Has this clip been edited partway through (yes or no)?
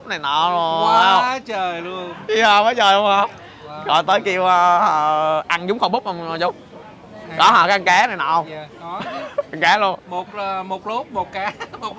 no